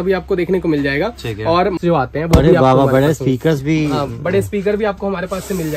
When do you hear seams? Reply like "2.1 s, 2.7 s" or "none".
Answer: 1.8 s

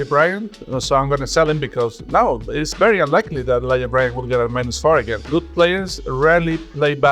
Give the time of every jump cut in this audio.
5.3 s

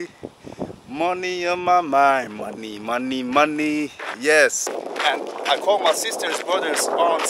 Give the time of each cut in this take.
4.6 s

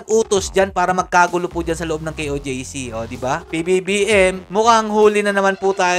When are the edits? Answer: 3.4 s

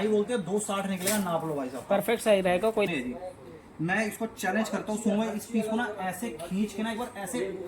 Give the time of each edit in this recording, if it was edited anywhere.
2.9 s

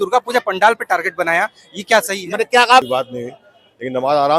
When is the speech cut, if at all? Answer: 2.9 s

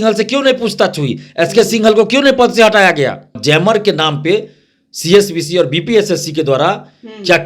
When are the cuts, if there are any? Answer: 3.3 s

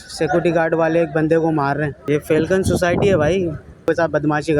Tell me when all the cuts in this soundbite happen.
2.0 s, 3.9 s

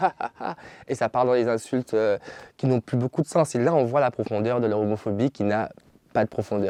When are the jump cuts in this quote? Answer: none

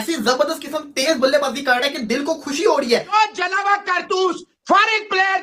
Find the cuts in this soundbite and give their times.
3.1 s

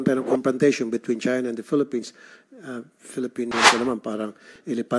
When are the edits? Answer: 3.5 s

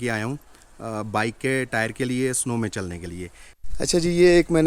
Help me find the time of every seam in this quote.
3.4 s

